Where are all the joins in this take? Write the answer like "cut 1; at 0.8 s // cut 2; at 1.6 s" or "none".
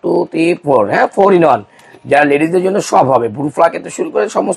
none